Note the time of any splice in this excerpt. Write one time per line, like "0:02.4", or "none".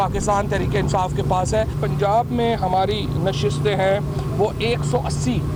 none